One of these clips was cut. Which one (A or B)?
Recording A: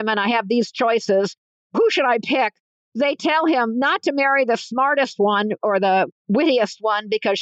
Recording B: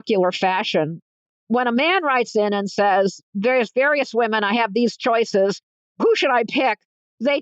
B